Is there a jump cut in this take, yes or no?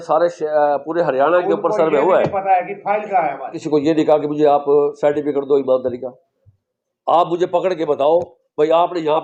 yes